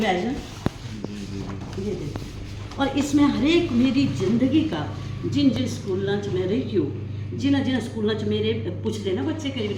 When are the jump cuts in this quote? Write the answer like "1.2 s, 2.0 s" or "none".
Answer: none